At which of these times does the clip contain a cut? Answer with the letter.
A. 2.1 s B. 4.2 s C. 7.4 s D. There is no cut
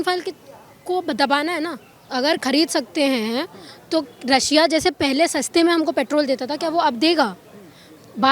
A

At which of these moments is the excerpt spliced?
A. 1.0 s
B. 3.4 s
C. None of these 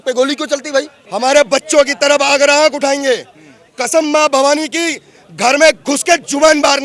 A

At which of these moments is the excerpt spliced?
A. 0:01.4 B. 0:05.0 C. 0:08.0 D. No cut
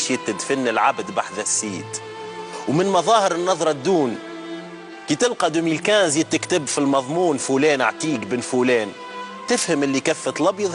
C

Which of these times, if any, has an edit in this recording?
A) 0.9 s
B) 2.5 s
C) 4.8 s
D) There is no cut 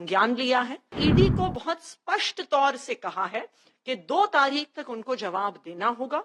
A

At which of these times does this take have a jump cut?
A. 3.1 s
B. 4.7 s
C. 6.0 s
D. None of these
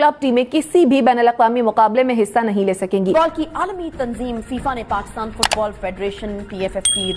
A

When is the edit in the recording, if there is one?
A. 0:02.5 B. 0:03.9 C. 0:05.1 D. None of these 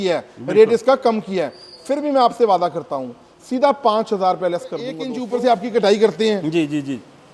C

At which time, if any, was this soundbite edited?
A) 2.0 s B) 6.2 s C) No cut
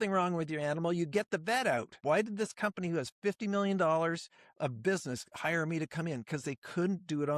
A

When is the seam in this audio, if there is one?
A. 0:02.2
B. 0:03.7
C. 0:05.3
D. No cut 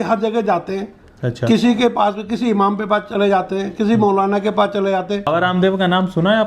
C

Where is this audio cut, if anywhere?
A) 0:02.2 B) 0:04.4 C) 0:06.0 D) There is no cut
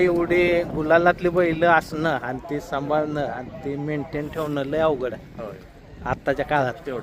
D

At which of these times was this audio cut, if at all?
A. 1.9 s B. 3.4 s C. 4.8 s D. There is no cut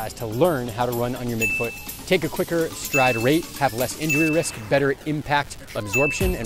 D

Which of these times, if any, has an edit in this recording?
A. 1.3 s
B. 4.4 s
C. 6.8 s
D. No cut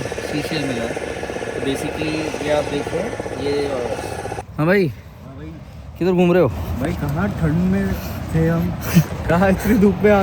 B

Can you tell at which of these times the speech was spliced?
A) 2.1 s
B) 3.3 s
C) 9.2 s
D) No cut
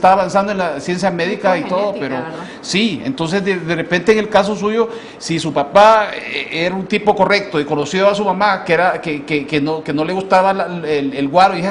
D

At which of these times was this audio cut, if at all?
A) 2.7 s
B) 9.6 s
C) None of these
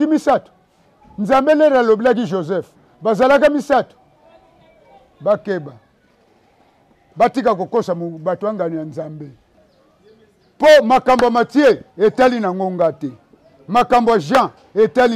B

